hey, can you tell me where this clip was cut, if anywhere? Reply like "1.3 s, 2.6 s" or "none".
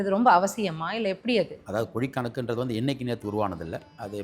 1.5 s

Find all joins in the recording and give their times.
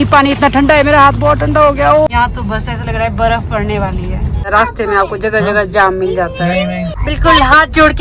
2.1 s, 4.5 s, 7.0 s

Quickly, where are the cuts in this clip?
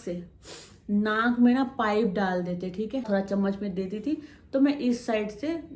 3.0 s

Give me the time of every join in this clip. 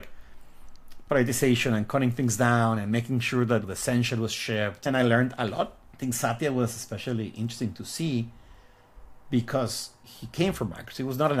4.8 s, 5.8 s

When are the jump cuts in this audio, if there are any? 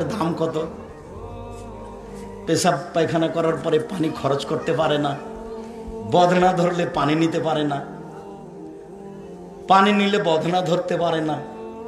0.8 s, 2.5 s

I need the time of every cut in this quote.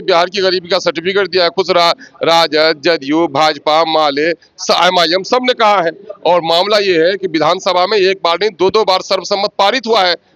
none

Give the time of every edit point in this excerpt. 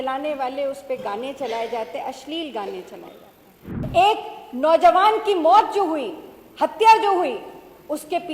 3.7 s

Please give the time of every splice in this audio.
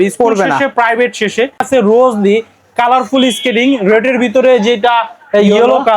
1.6 s

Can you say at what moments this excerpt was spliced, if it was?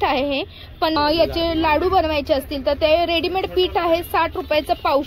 1.0 s

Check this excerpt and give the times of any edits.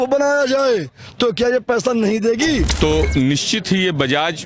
2.7 s

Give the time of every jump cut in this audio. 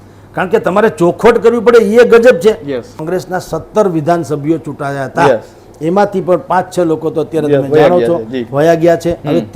2.9 s

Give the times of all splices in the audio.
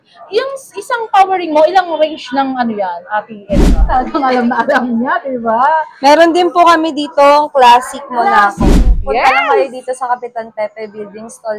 3.8 s, 8.7 s

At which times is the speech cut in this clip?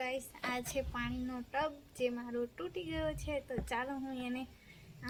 none

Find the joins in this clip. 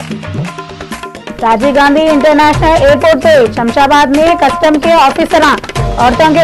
1.0 s

